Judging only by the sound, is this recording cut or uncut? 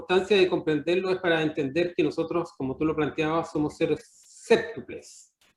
uncut